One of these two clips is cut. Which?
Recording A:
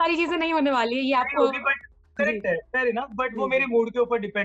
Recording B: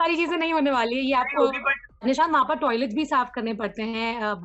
B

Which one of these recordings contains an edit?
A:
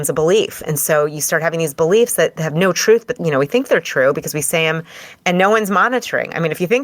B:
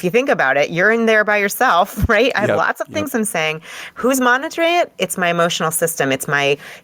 A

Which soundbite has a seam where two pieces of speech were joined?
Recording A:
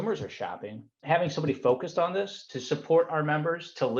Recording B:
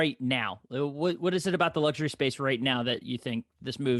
A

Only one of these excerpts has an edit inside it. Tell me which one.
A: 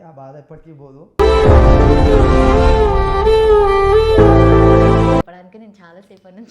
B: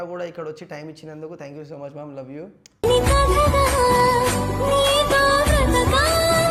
A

